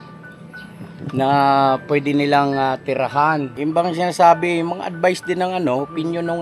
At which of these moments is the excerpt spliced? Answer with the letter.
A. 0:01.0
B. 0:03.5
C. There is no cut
B